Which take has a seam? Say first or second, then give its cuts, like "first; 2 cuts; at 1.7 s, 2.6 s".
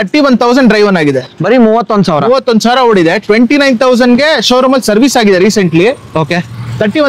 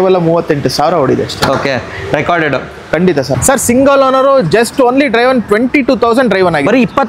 second; 1 cut; at 3.3 s